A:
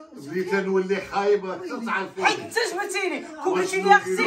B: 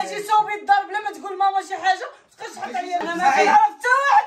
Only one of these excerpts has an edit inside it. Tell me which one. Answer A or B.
B